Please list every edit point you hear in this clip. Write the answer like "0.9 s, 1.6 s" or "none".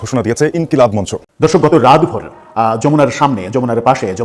1.2 s